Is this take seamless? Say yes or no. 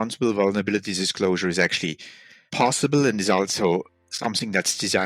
yes